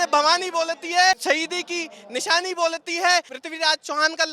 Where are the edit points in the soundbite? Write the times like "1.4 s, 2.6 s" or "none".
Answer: 1.2 s, 3.4 s